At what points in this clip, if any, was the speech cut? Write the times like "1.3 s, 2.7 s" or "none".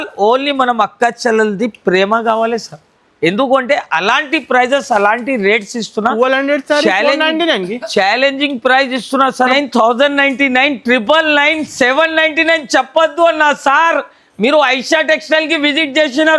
9.5 s